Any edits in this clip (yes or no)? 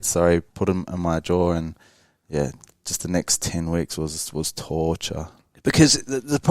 no